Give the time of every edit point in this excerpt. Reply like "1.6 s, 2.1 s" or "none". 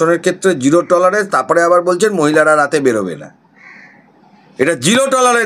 none